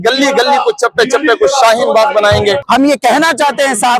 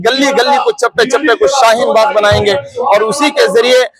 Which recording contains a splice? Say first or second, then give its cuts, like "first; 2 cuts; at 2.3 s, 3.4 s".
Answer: first; 1 cut; at 2.6 s